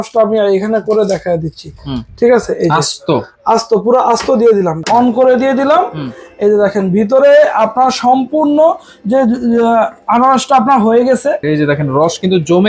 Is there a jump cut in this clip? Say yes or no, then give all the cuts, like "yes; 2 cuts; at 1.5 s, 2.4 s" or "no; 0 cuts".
yes; 2 cuts; at 4.8 s, 11.4 s